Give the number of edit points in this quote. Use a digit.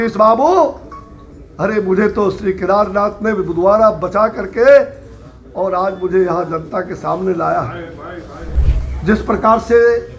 1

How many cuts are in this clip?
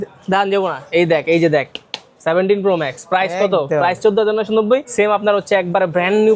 1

